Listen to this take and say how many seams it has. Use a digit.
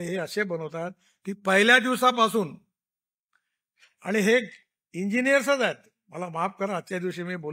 0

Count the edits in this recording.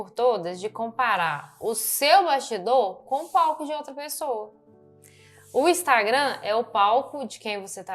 0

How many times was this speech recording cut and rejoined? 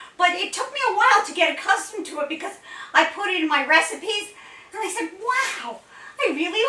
0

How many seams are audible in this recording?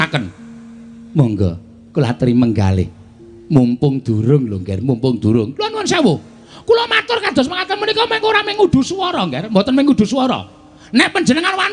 0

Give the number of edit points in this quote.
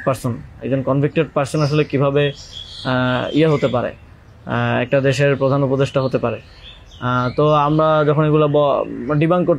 0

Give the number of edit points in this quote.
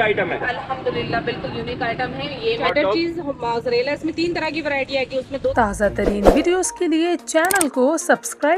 2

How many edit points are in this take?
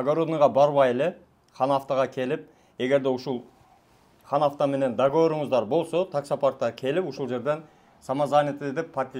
0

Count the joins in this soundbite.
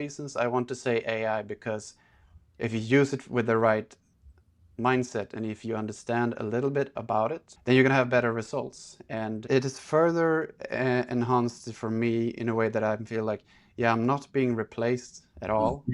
2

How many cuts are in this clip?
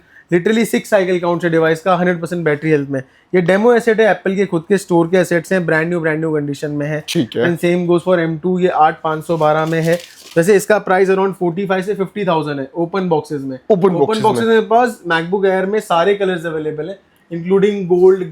0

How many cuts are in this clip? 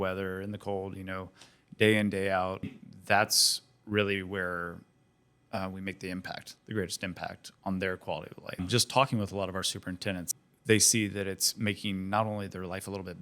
3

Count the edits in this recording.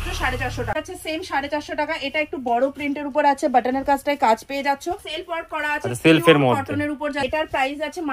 3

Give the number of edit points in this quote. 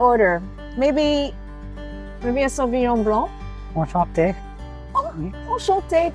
0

